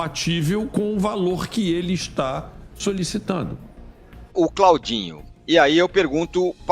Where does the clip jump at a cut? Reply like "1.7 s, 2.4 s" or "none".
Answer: 4.2 s